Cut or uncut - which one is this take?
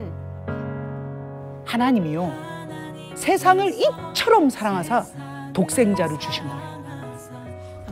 cut